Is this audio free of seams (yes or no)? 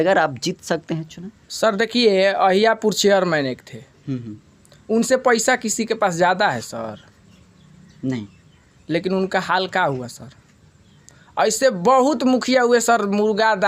yes